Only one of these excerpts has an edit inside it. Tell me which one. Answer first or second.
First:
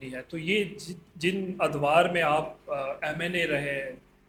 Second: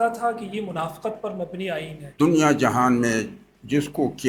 second